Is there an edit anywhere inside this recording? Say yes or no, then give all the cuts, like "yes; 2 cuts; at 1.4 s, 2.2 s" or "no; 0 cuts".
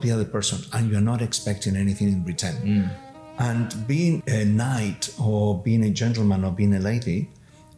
yes; 1 cut; at 4.2 s